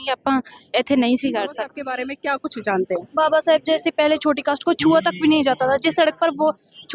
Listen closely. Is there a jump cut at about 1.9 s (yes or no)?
yes